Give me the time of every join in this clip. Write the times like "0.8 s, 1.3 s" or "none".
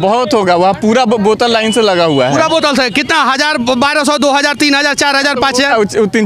none